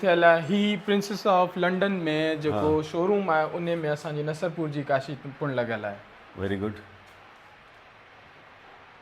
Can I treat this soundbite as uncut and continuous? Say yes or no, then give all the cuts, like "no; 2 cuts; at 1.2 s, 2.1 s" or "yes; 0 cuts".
yes; 0 cuts